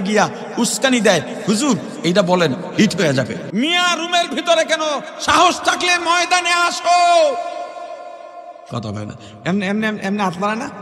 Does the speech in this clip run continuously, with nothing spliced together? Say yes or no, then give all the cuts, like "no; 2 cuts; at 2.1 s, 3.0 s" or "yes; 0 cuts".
no; 1 cut; at 3.4 s